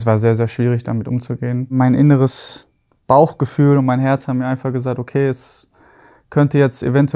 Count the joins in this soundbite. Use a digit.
1